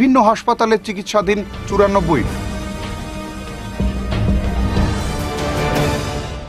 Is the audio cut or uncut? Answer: uncut